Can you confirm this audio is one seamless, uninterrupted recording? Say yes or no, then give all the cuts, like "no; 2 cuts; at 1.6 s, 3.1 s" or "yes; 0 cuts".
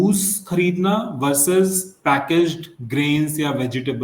yes; 0 cuts